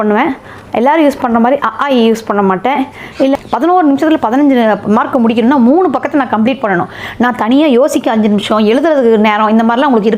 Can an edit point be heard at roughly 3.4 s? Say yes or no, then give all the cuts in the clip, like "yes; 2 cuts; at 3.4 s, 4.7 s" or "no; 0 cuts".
yes; 1 cut; at 3.4 s